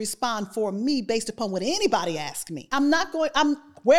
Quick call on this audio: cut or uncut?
cut